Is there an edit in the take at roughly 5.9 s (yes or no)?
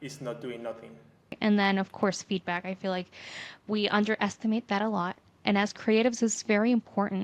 no